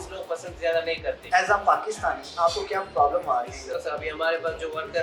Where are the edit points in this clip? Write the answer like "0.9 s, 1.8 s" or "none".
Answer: 1.2 s, 3.7 s